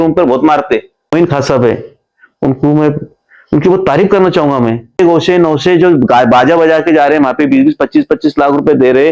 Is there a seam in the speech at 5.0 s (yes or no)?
yes